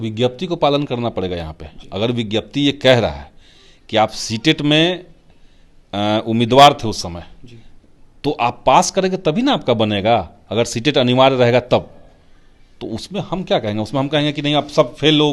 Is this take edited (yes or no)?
no